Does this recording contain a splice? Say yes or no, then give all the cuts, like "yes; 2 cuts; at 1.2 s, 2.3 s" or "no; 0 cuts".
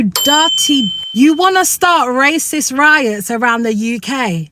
yes; 1 cut; at 0.9 s